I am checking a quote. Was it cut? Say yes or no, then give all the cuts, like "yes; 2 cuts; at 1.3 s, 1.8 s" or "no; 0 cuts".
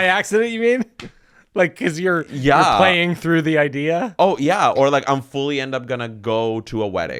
no; 0 cuts